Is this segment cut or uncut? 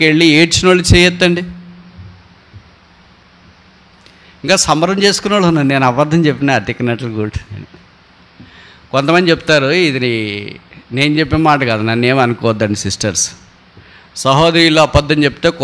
uncut